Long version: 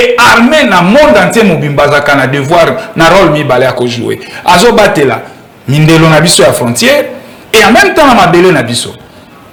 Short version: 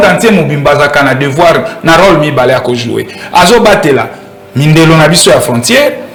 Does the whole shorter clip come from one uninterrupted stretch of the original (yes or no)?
yes